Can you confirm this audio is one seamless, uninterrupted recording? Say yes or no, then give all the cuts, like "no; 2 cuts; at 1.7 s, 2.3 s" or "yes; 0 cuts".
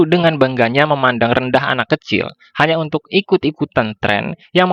yes; 0 cuts